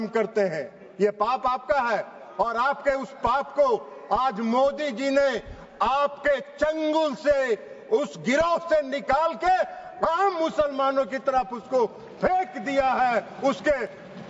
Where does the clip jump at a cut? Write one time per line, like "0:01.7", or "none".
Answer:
none